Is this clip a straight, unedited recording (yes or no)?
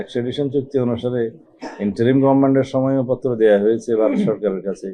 yes